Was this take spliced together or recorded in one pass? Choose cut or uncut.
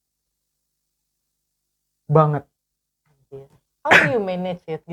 cut